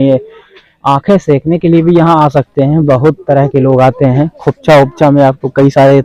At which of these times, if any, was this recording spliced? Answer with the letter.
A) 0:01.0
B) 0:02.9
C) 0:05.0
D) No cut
D